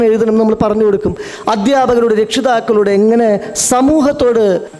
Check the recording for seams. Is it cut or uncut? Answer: uncut